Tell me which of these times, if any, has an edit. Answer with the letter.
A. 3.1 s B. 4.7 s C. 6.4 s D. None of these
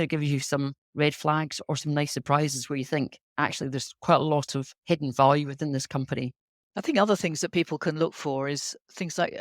C